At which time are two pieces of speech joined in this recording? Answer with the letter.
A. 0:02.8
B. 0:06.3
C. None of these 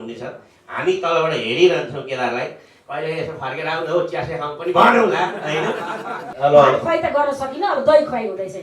B